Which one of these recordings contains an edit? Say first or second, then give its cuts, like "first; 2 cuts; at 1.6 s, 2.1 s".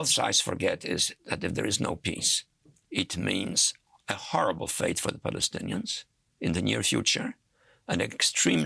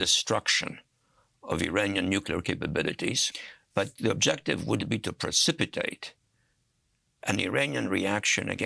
second; 1 cut; at 3.3 s